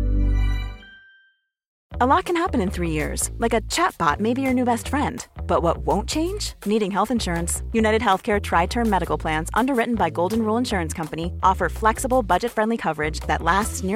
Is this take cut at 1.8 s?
yes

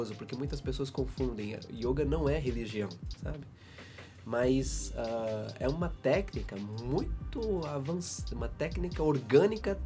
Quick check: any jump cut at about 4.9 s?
no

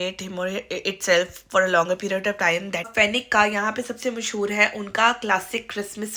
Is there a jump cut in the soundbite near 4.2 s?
no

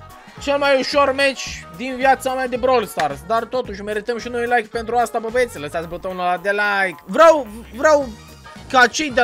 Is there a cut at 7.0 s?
yes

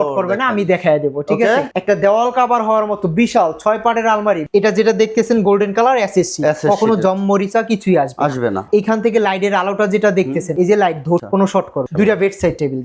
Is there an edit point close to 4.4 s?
yes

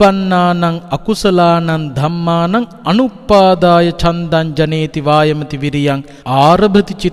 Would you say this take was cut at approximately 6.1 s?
yes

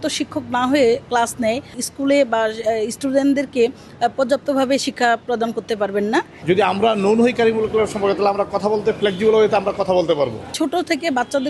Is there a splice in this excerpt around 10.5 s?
yes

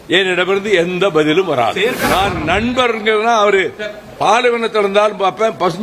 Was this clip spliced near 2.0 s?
yes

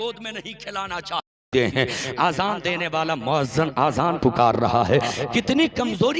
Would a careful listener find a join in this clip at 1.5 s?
yes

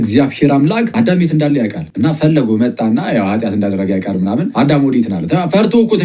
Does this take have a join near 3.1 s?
no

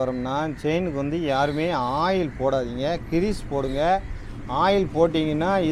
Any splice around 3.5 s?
no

